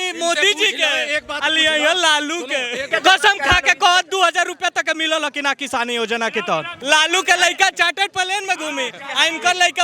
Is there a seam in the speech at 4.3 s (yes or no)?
no